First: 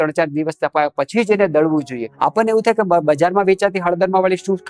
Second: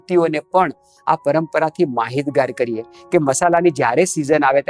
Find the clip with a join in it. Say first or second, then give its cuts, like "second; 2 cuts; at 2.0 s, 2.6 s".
first; 1 cut; at 2.0 s